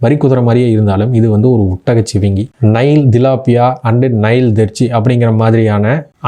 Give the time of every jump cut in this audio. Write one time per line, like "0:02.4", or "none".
0:02.5